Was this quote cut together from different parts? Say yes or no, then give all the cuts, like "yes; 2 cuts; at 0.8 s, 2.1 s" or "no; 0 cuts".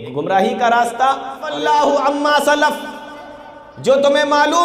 yes; 1 cut; at 1.5 s